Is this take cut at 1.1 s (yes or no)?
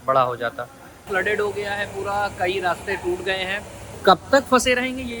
yes